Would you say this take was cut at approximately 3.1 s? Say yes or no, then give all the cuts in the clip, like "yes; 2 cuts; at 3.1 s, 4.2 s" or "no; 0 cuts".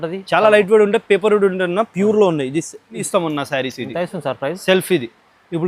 yes; 1 cut; at 3.1 s